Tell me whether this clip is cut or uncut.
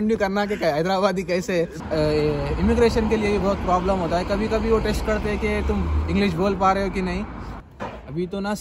cut